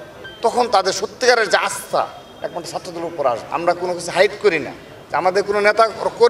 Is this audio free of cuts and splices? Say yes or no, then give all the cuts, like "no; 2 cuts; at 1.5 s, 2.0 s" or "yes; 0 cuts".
no; 1 cut; at 3.4 s